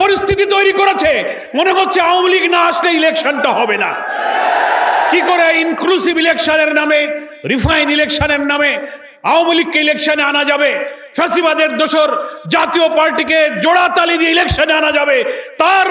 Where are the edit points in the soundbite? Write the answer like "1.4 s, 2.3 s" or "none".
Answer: none

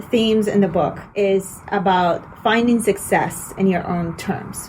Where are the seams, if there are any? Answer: 1.0 s

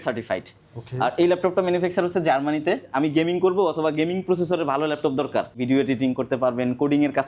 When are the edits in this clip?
2.9 s, 5.5 s

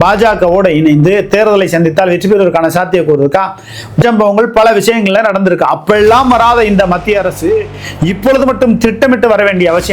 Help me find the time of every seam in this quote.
4.0 s

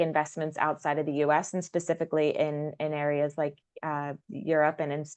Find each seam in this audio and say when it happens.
none

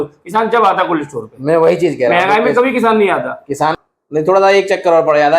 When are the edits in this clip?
3.8 s

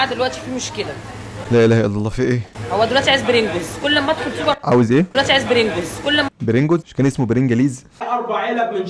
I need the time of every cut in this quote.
none

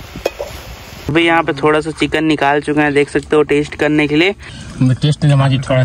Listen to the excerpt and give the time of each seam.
0.9 s, 4.6 s

